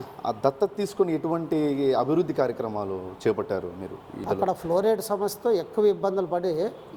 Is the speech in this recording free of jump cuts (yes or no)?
no